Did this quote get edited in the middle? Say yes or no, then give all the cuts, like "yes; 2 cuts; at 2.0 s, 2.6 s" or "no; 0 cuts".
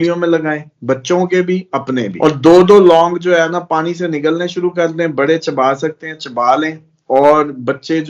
yes; 1 cut; at 2.1 s